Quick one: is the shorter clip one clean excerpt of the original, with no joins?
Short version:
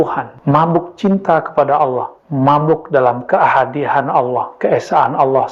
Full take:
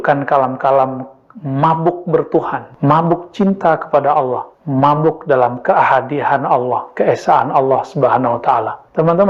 yes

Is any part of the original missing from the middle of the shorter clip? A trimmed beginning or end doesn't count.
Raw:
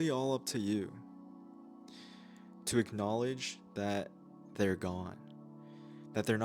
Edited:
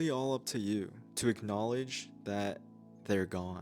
yes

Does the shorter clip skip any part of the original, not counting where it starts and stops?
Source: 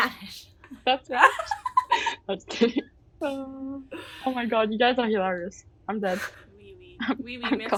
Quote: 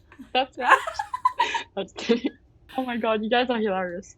yes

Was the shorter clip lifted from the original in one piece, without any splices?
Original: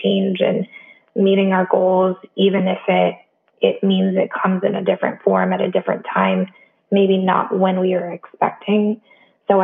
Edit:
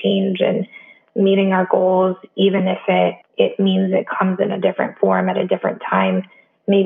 no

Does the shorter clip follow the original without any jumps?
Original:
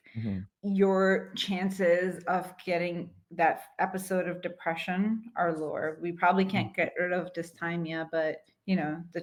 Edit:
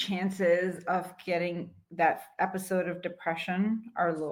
yes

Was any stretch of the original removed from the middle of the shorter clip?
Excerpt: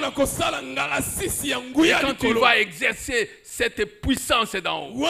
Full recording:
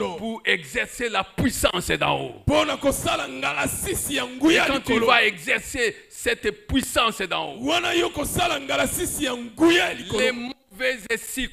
no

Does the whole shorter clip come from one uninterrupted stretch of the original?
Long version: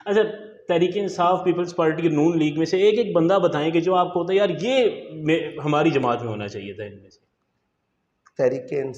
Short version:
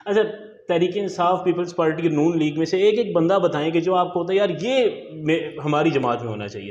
yes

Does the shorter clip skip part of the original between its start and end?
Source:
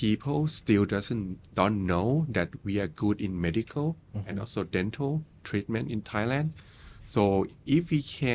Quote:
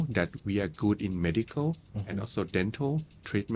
no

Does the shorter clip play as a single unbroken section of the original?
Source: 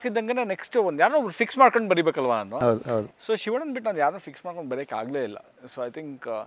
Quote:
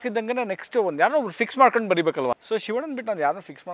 no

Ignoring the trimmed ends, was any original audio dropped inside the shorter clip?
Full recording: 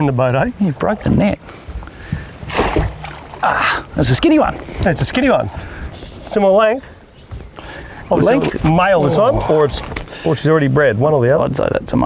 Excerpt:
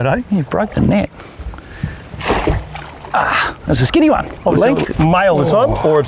yes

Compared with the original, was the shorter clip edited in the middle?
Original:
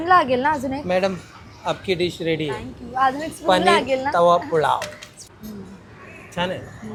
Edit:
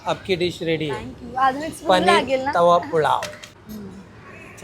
yes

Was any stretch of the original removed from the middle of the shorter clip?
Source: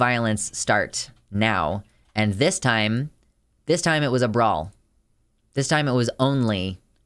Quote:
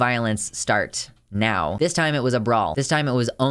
yes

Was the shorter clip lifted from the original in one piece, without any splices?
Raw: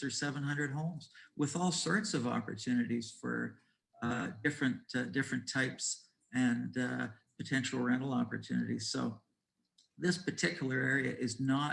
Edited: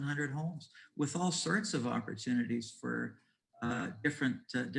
yes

